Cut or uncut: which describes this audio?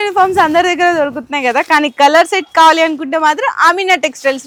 uncut